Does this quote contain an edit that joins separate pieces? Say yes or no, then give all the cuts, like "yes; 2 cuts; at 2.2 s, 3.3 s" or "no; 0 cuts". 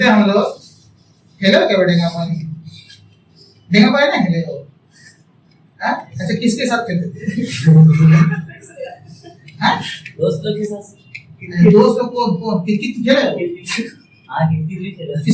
no; 0 cuts